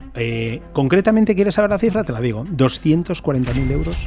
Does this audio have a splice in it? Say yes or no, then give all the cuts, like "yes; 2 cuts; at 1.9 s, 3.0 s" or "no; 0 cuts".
no; 0 cuts